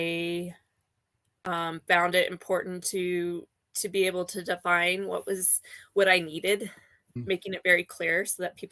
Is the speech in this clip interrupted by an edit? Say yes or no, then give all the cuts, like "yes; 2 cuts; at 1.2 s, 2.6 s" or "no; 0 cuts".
yes; 1 cut; at 7.1 s